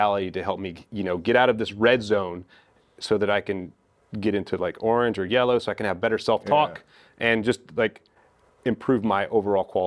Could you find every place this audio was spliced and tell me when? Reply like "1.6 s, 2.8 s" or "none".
none